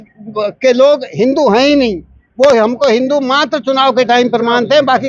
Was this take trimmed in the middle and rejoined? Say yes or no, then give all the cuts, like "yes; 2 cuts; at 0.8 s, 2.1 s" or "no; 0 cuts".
no; 0 cuts